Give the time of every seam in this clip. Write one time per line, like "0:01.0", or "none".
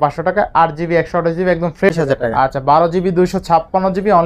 0:01.9